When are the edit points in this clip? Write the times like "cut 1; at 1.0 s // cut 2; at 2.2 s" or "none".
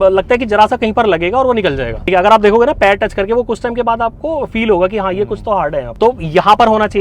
cut 1; at 2.1 s // cut 2; at 5.9 s